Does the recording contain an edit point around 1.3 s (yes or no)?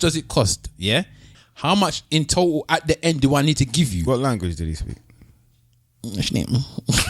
yes